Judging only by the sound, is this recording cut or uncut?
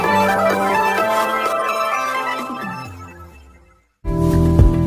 cut